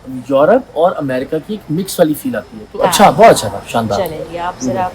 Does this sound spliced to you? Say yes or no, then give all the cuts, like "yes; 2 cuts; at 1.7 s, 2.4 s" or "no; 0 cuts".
no; 0 cuts